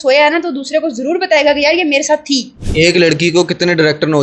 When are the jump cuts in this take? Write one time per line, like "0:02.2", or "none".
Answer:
0:02.6